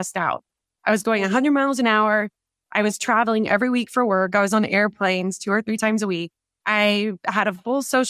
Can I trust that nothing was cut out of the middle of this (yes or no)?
yes